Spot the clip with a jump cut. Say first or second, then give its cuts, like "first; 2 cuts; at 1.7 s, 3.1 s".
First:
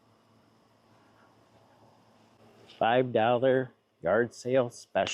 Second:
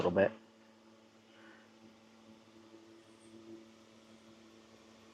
first; 1 cut; at 2.4 s